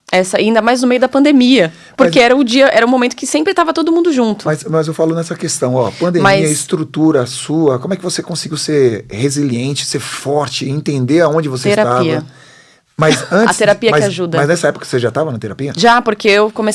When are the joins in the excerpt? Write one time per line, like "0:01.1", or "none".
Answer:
none